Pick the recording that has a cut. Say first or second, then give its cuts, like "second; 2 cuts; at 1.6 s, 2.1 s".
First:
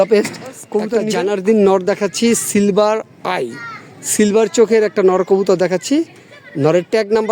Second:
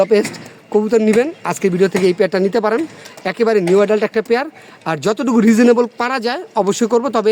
first; 1 cut; at 1.0 s